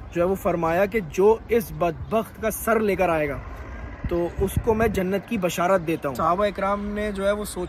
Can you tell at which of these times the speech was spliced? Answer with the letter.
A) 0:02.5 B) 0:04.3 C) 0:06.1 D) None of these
C